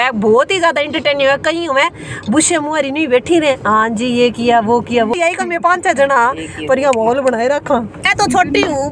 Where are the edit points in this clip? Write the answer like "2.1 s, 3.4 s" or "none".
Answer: 5.1 s, 8.0 s